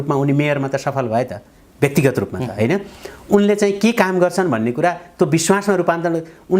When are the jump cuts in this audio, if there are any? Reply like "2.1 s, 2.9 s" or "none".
none